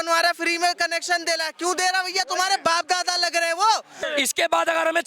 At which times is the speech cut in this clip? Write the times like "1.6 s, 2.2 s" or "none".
4.0 s